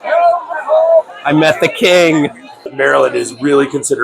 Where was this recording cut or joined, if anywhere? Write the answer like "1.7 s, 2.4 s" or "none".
2.6 s